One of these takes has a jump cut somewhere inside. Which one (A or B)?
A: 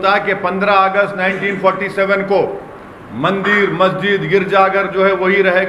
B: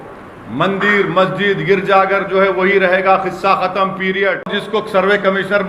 B